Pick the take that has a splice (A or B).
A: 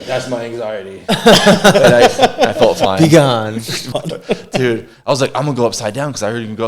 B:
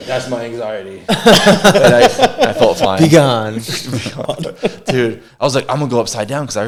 A